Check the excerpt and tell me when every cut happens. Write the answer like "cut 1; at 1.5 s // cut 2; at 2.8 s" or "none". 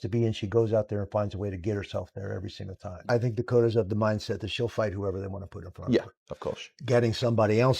cut 1; at 3.1 s